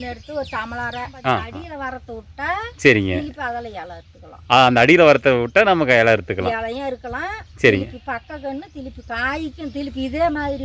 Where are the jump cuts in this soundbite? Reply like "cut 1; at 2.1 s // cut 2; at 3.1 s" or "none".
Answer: cut 1; at 1.6 s